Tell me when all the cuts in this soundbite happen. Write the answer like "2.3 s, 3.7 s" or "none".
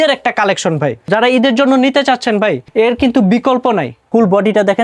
1.1 s, 2.6 s, 3.9 s